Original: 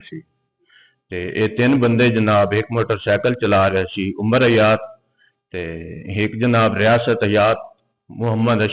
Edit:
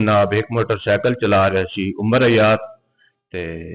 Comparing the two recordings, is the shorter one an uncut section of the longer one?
yes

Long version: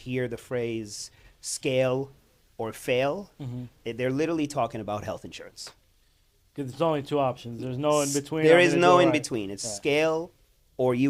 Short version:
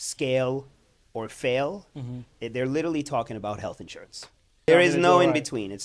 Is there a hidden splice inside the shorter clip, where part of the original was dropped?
yes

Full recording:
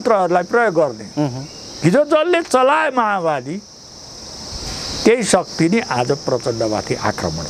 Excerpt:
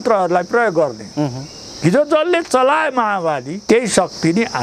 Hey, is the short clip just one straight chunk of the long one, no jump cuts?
no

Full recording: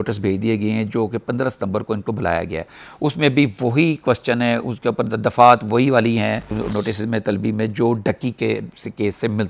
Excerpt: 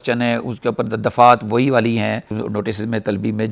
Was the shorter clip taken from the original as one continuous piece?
yes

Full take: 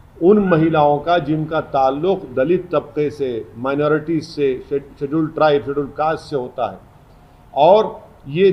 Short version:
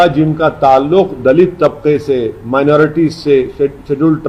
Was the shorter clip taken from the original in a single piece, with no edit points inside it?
yes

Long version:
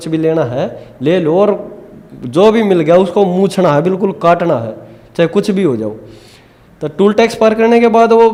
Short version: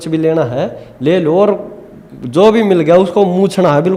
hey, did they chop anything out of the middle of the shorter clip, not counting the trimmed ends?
no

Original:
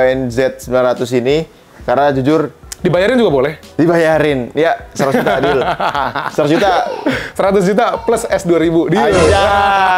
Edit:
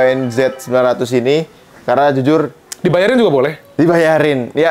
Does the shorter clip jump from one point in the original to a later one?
no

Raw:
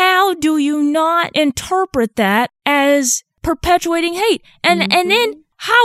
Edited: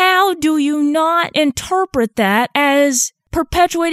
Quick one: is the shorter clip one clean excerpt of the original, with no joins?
no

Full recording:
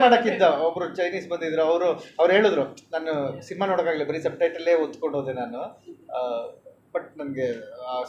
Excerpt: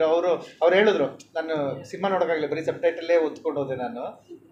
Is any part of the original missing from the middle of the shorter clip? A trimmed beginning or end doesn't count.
no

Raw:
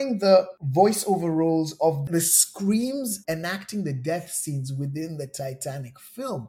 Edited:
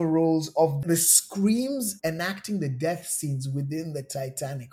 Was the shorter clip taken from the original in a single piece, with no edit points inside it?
yes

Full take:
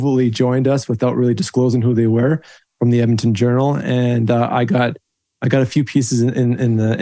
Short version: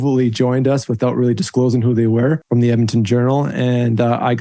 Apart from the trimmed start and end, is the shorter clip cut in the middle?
yes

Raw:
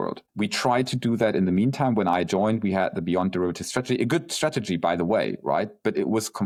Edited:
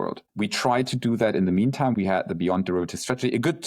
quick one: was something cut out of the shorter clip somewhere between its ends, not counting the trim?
yes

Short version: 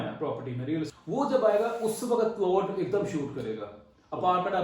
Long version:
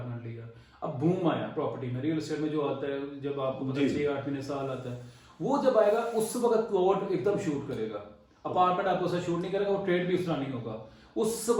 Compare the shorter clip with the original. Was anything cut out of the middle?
yes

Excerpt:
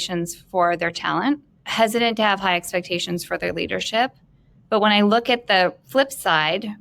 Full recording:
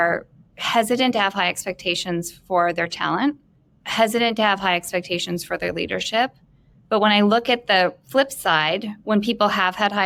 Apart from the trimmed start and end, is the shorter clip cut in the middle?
yes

